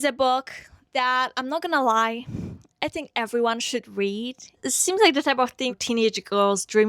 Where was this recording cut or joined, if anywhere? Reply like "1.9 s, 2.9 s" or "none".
4.4 s, 5.8 s